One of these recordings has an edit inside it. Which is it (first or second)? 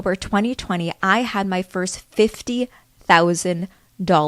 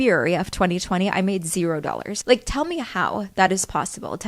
second